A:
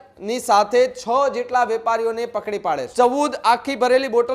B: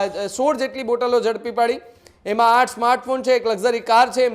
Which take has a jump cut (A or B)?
A